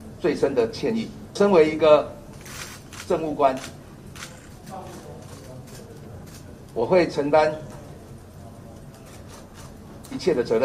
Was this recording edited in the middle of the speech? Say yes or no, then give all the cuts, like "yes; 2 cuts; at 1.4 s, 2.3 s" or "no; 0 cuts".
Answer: yes; 1 cut; at 1.4 s